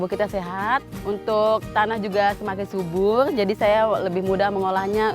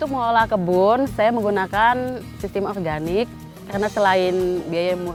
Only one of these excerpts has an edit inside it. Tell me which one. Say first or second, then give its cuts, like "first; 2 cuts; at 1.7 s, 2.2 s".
first; 1 cut; at 0.9 s